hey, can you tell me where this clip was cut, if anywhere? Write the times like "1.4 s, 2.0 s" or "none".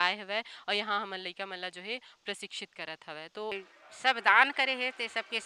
3.5 s